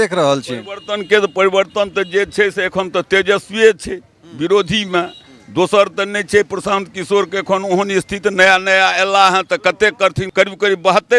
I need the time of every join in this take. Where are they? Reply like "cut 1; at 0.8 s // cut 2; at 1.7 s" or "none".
cut 1; at 10.2 s